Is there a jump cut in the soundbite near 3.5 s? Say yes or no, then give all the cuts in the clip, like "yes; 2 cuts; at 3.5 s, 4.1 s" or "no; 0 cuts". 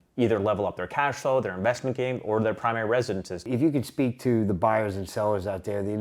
yes; 1 cut; at 3.5 s